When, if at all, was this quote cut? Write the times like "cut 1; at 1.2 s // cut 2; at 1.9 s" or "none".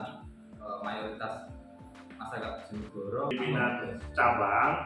cut 1; at 3.3 s